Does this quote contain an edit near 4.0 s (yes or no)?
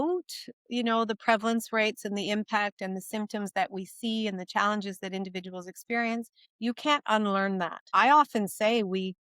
no